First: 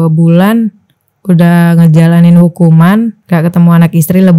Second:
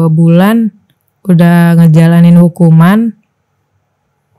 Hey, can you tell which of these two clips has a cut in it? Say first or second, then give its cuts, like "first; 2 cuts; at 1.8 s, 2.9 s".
first; 1 cut; at 3.2 s